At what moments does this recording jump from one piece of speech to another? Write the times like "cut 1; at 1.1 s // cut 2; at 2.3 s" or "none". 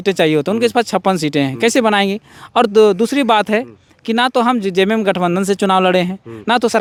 none